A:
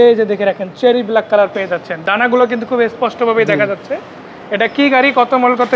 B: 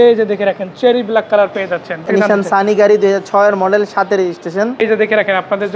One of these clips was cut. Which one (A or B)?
B